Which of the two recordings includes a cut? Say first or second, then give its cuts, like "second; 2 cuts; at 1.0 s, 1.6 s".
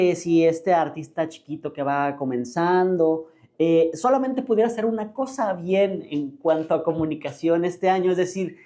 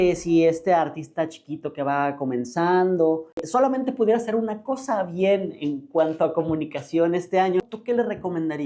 second; 2 cuts; at 3.5 s, 7.6 s